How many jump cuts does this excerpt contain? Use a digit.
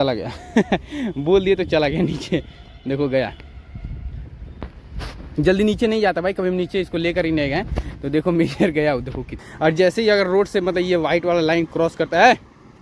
1